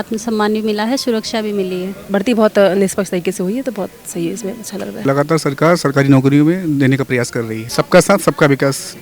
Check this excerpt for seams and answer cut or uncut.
cut